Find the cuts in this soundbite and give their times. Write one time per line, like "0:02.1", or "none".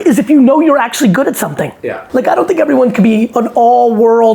0:02.0
0:03.3